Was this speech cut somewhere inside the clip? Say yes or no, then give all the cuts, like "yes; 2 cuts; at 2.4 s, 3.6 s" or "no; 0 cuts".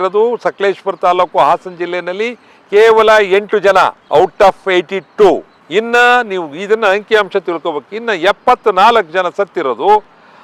no; 0 cuts